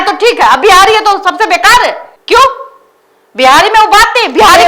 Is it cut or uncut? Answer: uncut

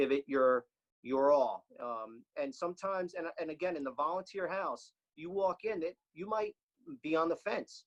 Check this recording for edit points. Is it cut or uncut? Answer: uncut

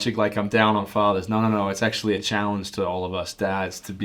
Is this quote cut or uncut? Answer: uncut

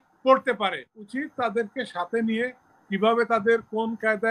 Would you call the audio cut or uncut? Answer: cut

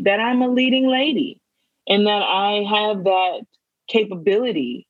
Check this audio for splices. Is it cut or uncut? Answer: uncut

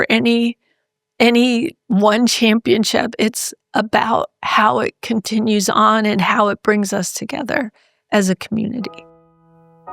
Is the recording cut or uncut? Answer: cut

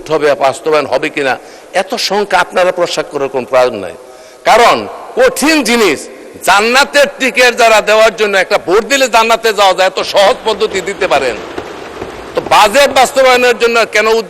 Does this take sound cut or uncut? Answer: uncut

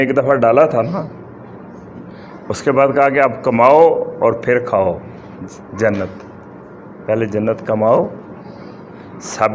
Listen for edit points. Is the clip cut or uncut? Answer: uncut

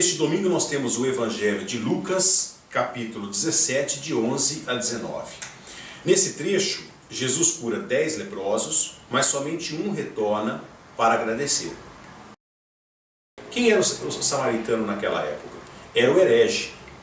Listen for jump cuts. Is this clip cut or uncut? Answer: cut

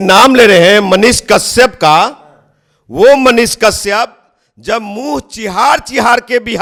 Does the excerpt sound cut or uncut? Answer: uncut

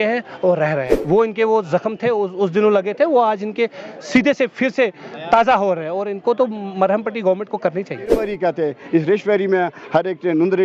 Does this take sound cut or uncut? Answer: cut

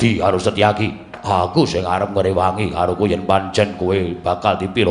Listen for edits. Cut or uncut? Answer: cut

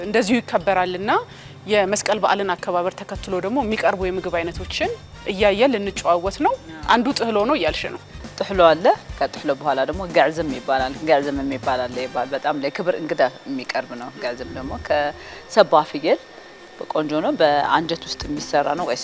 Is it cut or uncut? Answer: uncut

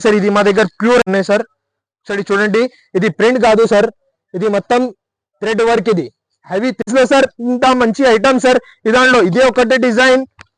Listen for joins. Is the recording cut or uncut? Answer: cut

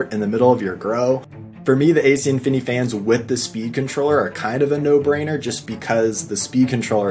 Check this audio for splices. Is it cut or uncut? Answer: cut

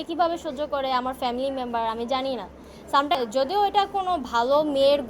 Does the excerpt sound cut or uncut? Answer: cut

